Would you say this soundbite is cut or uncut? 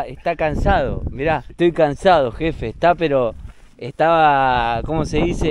uncut